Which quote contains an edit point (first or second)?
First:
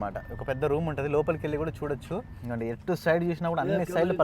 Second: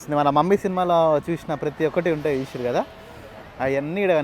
first